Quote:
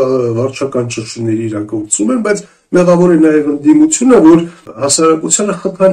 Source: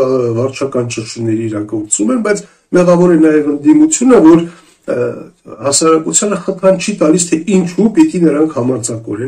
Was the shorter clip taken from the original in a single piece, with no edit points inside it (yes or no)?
no